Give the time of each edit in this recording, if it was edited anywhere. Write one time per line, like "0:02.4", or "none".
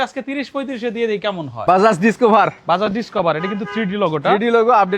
0:01.6